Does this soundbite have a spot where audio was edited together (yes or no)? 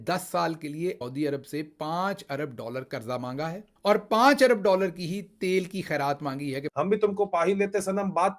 yes